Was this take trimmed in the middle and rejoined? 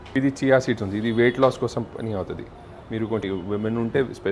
yes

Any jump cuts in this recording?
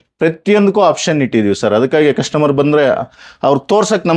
no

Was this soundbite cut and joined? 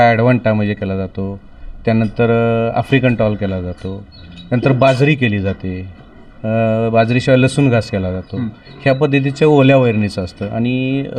no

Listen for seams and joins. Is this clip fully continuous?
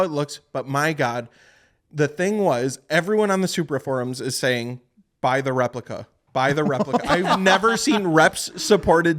yes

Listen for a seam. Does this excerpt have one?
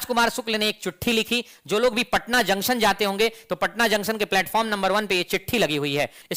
no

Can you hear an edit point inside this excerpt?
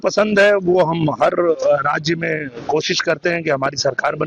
no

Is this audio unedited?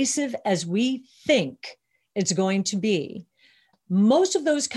no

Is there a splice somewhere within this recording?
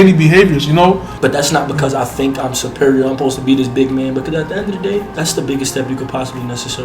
yes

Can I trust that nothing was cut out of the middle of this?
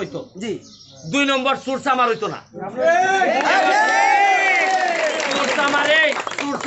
yes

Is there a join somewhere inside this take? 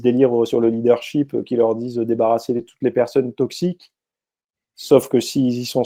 no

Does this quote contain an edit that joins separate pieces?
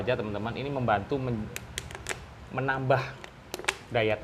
no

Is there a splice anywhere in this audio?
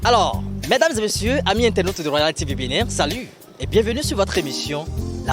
no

